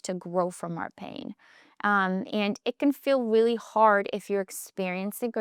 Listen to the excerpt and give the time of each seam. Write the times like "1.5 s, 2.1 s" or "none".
none